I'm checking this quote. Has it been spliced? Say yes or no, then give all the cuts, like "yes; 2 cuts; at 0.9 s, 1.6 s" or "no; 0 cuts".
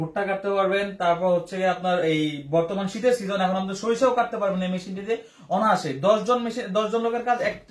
no; 0 cuts